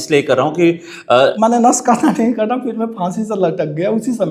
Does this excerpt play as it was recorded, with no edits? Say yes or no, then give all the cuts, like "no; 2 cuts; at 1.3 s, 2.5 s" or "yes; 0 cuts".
no; 1 cut; at 1.3 s